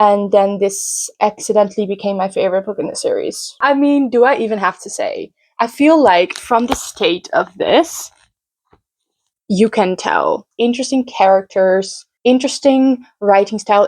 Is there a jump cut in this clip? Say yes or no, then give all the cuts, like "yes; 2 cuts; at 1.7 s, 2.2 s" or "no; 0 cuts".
yes; 2 cuts; at 3.4 s, 10.5 s